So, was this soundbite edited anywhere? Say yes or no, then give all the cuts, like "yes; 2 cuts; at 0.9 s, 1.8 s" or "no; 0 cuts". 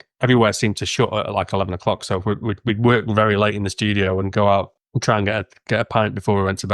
yes; 1 cut; at 4.8 s